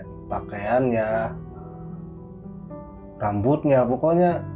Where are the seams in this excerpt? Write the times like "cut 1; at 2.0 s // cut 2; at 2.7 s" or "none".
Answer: none